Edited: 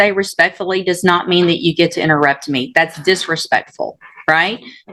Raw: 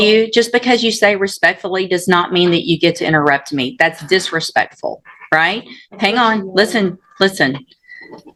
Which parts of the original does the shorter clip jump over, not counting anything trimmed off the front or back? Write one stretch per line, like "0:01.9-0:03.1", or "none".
none